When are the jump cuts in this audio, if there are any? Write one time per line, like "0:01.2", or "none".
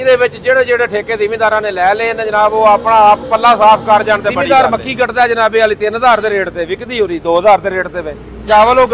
0:04.4